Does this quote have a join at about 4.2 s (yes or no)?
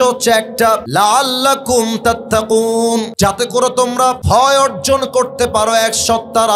yes